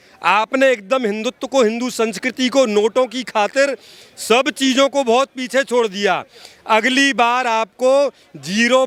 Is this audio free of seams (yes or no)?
yes